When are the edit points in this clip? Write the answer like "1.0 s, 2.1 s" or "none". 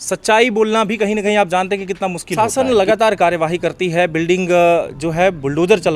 2.3 s